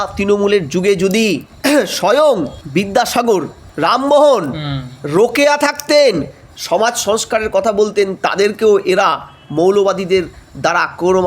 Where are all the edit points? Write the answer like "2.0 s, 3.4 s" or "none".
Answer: 1.5 s, 2.6 s, 3.6 s